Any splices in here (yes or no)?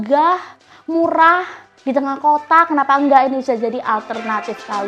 no